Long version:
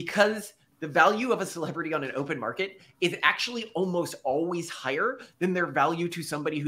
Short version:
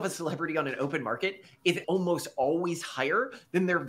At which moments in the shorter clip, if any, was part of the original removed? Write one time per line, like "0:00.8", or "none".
0:01.8